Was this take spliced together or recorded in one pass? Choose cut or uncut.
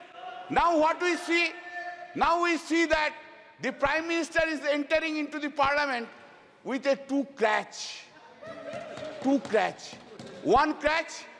uncut